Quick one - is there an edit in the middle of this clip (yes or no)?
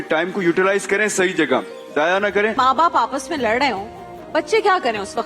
yes